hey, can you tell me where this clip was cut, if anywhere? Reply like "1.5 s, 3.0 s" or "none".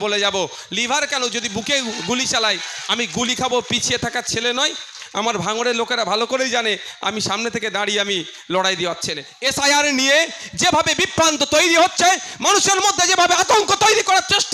9.3 s